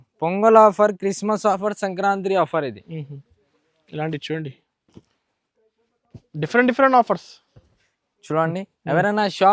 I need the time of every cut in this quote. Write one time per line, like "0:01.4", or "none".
none